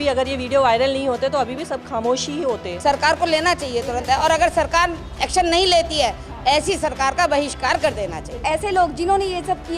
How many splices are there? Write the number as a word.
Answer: two